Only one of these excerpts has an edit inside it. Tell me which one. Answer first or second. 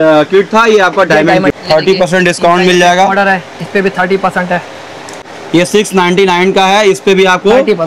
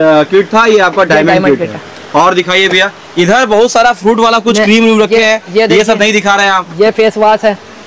first